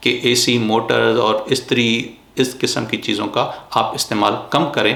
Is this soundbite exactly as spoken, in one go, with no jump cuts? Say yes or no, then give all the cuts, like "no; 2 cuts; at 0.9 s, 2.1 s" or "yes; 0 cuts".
yes; 0 cuts